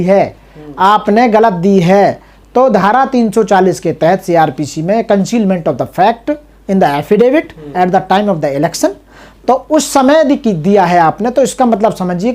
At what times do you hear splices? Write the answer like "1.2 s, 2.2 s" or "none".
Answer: none